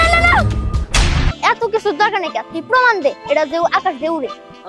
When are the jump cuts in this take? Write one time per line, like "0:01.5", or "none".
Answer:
0:01.3